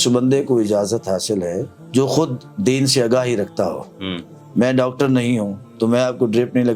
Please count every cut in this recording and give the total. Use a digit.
0